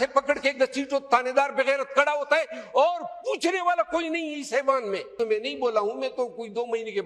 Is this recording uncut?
no; 1 cut; at 5.1 s

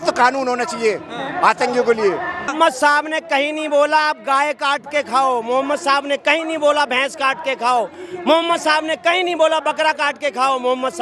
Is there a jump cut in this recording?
yes; 1 cut; at 2.5 s

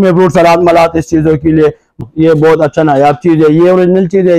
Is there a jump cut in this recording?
yes; 1 cut; at 2.0 s

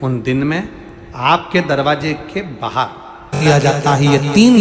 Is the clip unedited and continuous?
no; 1 cut; at 3.4 s

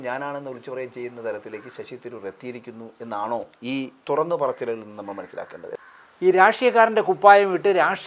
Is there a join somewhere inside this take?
yes; 1 cut; at 5.6 s

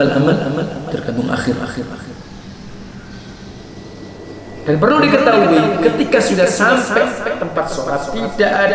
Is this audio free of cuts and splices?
no; 1 cut; at 4.1 s

